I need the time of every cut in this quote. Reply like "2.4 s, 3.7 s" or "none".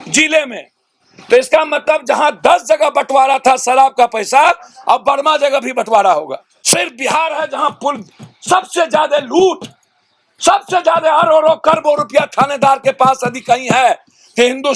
6.5 s